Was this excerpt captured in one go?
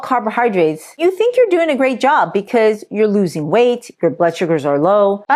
no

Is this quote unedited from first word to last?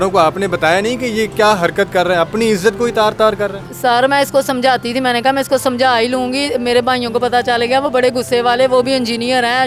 yes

